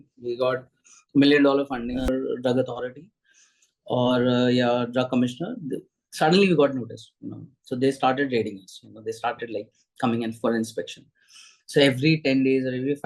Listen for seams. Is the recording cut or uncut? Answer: cut